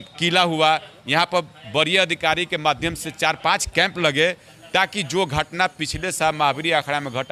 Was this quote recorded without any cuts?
yes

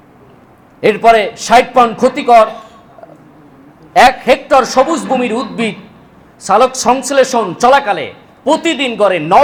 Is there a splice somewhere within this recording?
no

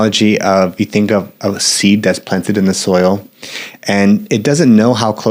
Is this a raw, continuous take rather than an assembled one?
yes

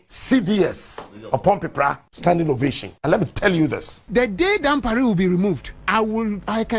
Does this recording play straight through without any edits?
no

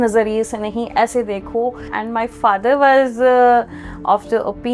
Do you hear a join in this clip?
yes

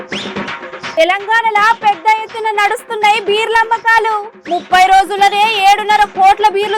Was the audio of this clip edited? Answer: yes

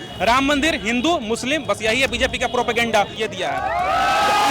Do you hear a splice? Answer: yes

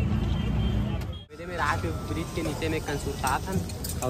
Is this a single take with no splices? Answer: no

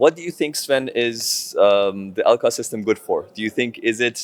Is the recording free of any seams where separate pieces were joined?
yes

